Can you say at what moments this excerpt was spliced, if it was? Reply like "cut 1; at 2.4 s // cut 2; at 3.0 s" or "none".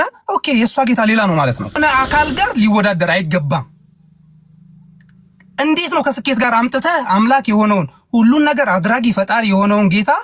cut 1; at 1.8 s